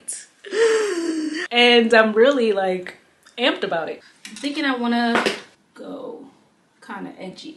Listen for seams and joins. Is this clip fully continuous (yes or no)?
no